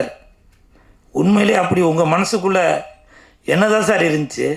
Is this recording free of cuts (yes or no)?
yes